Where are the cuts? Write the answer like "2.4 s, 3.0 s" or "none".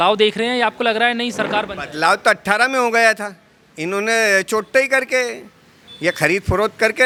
none